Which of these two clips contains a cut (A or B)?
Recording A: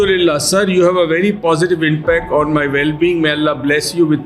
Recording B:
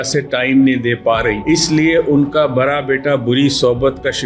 B